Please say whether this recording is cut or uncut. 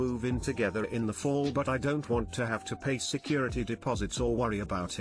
uncut